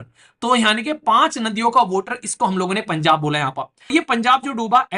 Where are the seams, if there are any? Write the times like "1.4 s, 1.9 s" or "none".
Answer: 3.9 s

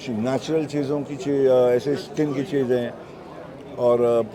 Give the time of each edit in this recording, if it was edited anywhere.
none

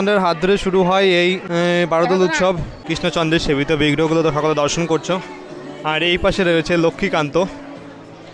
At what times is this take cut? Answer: 2.7 s

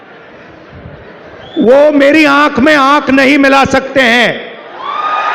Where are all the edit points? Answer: none

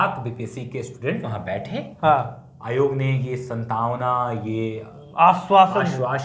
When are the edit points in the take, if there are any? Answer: none

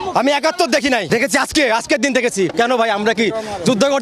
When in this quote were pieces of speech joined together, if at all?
1.0 s, 2.5 s

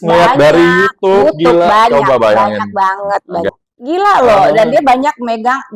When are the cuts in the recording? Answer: 3.5 s

